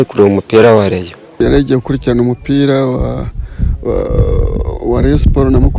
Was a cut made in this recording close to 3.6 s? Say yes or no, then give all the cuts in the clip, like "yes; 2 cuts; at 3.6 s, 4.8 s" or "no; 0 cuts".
no; 1 cut; at 1.4 s